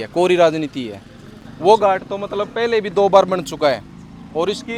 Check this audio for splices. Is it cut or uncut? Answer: uncut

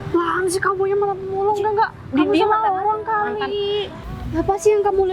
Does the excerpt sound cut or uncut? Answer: cut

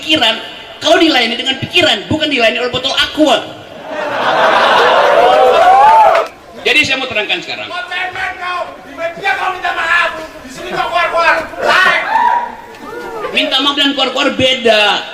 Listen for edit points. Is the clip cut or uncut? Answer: cut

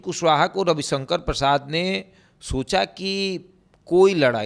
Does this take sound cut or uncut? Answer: uncut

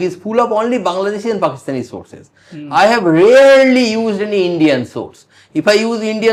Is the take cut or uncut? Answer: uncut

